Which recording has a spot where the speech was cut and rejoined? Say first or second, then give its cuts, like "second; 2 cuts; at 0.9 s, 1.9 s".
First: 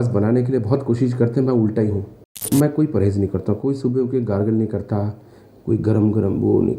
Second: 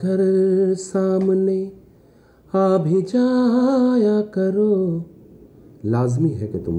first; 1 cut; at 2.4 s